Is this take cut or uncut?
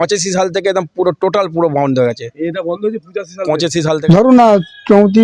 cut